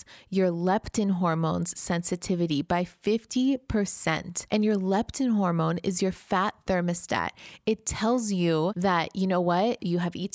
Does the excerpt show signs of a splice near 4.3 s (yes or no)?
yes